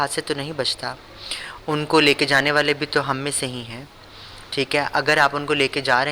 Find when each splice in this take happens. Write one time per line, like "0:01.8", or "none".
none